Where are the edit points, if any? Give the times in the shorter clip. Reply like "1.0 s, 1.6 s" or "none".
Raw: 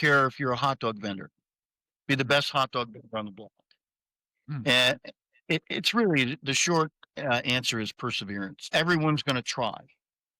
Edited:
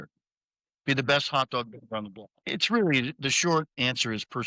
2.5 s, 3.8 s

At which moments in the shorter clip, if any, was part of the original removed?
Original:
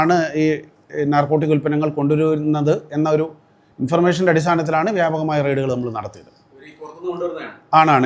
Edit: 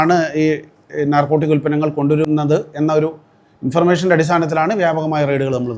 2.2 s

